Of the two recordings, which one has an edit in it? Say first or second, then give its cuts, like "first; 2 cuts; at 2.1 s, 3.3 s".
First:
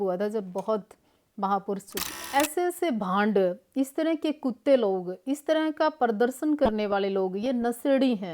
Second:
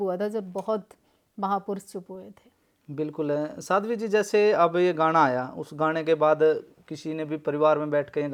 first; 1 cut; at 2.3 s